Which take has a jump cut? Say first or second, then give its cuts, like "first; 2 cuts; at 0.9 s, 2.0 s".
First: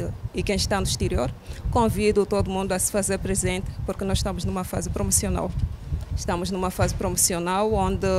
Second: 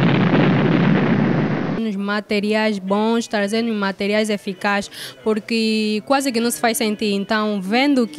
second; 1 cut; at 1.8 s